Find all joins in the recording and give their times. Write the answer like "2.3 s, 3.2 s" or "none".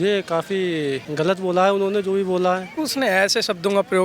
1.0 s, 2.7 s